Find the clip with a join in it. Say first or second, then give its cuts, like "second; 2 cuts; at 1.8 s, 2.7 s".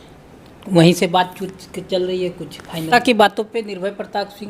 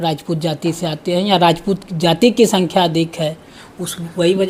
first; 1 cut; at 2.9 s